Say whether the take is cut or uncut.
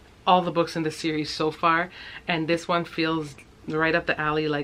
uncut